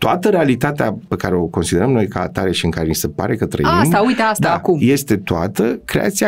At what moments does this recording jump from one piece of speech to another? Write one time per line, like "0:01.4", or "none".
0:01.1